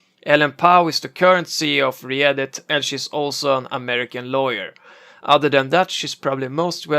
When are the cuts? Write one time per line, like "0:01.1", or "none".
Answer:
0:04.4